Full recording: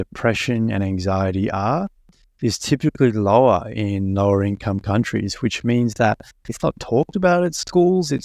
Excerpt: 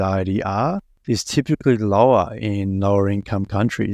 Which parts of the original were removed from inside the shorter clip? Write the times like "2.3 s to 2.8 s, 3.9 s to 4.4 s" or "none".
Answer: 2.0 s to 2.2 s